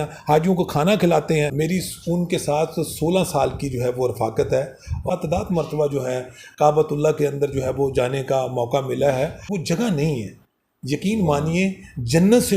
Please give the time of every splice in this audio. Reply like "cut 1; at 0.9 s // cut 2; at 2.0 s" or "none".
cut 1; at 1.5 s // cut 2; at 5.1 s // cut 3; at 9.5 s